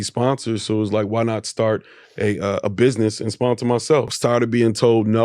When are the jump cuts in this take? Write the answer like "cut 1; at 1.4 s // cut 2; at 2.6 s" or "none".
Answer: cut 1; at 4.1 s

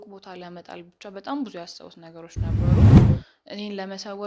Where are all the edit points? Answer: cut 1; at 3.2 s

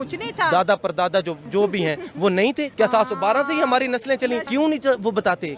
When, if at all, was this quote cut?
cut 1; at 2.7 s // cut 2; at 4.5 s

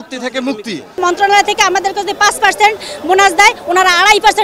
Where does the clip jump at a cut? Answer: cut 1; at 1.0 s

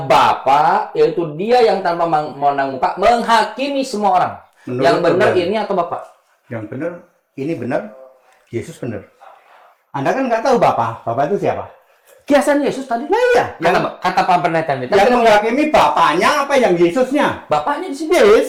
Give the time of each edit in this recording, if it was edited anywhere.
none

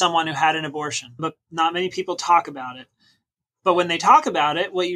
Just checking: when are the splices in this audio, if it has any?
cut 1; at 1.0 s

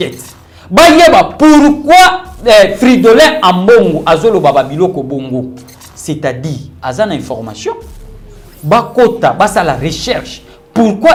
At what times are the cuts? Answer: none

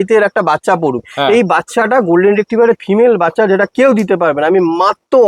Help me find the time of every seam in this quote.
none

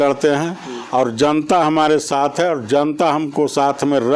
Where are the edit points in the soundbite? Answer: none

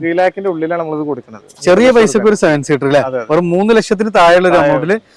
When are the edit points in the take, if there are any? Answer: none

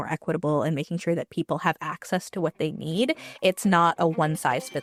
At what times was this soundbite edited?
none

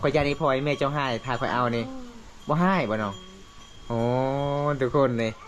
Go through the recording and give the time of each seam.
none

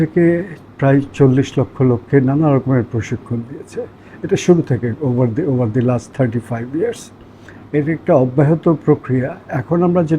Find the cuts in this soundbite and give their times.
none

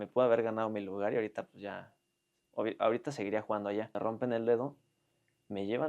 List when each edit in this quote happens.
cut 1; at 3.9 s

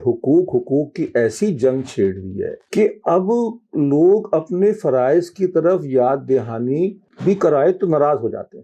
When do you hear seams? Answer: cut 1; at 2.6 s // cut 2; at 7.1 s

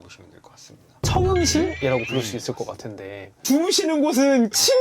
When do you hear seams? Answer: none

